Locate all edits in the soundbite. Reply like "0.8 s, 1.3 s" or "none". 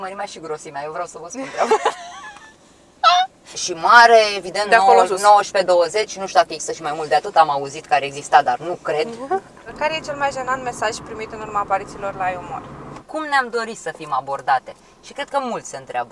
3.6 s, 9.6 s, 13.0 s